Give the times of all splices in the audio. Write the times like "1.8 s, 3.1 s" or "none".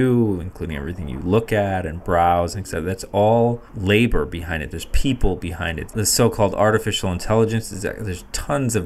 3.7 s, 5.9 s